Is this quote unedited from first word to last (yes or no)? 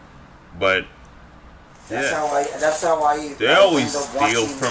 no